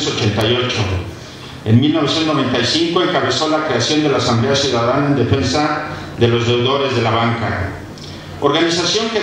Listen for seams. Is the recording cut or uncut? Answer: uncut